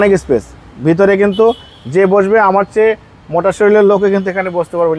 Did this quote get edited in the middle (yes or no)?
no